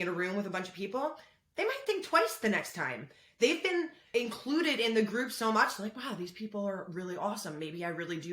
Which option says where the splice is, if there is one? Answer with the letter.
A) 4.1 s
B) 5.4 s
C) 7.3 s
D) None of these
A